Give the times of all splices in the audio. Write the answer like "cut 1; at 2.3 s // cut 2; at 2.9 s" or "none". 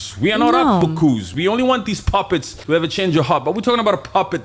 cut 1; at 2.5 s